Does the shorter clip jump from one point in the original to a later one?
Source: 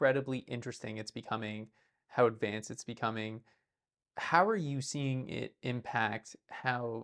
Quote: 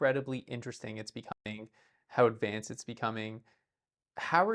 no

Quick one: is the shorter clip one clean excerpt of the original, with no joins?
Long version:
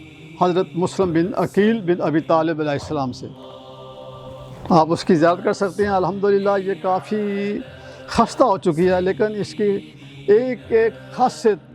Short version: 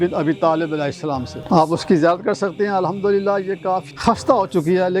no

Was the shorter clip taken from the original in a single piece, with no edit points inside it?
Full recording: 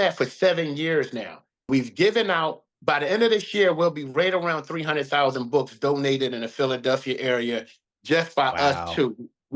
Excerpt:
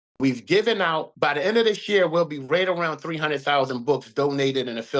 no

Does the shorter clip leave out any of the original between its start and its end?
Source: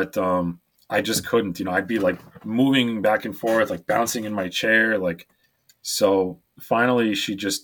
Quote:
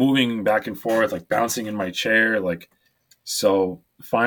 no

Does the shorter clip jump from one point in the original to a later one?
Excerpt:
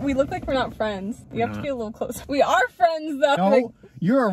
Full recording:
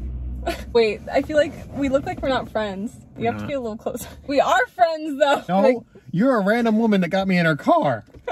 yes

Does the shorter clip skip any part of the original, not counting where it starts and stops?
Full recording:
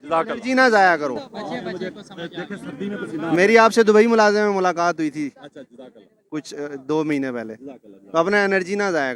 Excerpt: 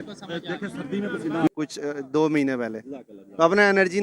yes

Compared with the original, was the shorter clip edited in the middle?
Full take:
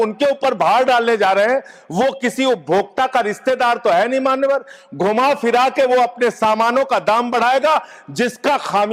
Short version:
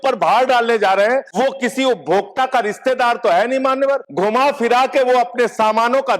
yes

